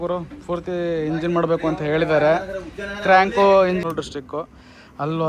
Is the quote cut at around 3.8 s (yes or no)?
yes